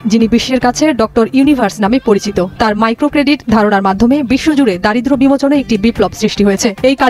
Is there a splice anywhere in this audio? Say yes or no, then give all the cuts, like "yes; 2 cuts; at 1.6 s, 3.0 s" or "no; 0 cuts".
no; 0 cuts